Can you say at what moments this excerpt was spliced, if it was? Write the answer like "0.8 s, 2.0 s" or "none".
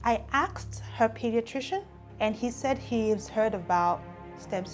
2.0 s